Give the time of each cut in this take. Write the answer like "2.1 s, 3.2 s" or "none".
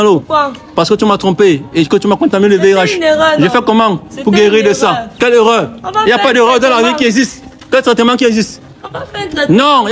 none